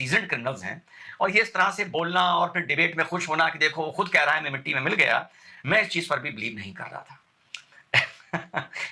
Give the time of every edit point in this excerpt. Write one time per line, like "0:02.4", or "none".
none